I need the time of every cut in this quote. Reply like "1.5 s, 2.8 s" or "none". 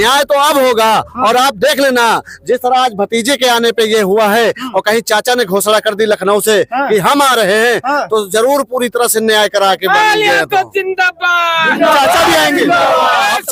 none